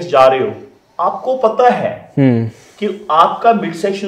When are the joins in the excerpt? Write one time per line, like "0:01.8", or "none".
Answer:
none